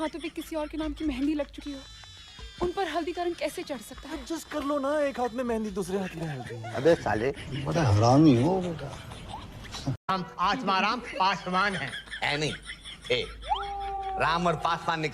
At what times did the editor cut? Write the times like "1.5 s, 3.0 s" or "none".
10.1 s